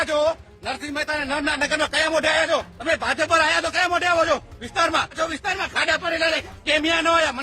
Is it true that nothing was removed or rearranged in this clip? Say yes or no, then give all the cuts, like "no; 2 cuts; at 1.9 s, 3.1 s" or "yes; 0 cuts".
no; 2 cuts; at 2.7 s, 5.1 s